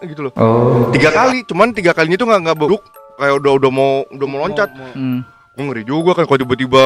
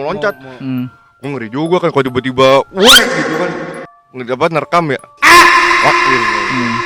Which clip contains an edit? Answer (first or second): first